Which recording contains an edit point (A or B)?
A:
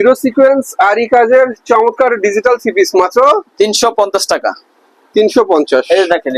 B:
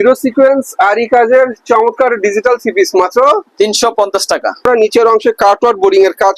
B